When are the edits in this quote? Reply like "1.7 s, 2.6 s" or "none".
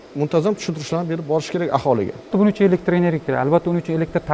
2.3 s